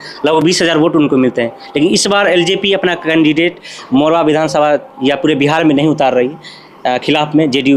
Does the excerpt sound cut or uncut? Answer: uncut